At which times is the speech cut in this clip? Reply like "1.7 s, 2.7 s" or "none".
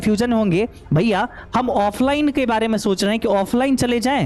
none